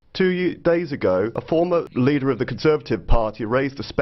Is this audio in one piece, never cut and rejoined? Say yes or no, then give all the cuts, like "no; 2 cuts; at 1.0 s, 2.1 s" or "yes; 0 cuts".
no; 1 cut; at 1.5 s